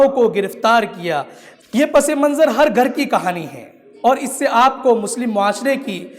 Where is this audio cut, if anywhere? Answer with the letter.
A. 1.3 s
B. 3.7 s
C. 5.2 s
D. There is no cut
A